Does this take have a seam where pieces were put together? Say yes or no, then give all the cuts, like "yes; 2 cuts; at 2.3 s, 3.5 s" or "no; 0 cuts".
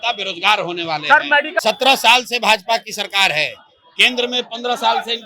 yes; 1 cut; at 1.6 s